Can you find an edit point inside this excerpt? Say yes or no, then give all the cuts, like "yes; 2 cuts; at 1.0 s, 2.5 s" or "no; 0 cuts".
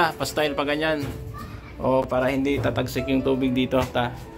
yes; 1 cut; at 2.1 s